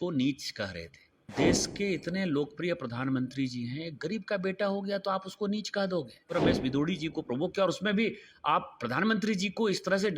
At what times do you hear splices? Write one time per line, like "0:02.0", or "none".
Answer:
0:01.3
0:06.3

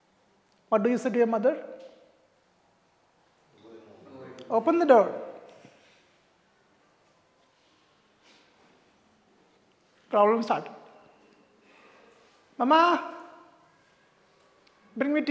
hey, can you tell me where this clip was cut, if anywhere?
none

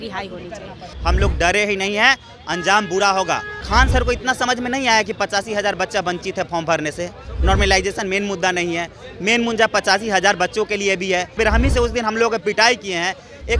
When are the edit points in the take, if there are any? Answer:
0:00.9
0:03.5
0:11.4

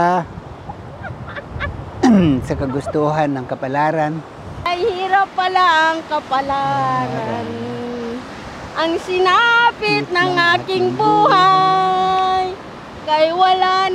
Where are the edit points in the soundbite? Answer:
0:04.7

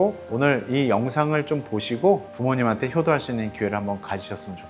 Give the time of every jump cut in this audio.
none

